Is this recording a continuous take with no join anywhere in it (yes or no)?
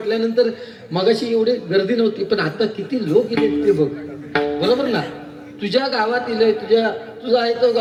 yes